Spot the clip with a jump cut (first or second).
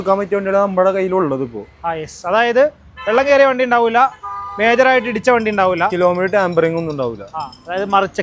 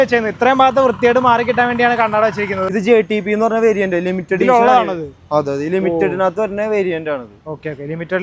second